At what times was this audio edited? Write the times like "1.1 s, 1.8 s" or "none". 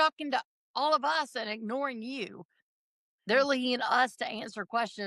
none